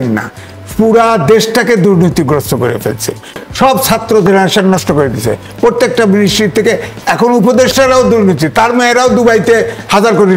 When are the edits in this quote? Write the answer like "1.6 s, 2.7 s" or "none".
3.4 s